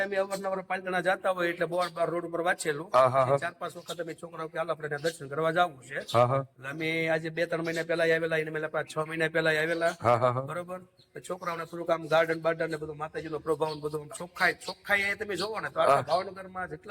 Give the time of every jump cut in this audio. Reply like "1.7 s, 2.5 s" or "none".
none